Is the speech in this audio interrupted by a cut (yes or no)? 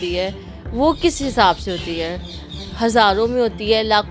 no